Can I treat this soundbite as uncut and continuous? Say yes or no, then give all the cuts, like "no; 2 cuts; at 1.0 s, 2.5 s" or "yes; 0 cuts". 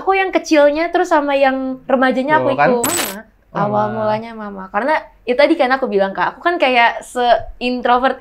no; 1 cut; at 2.9 s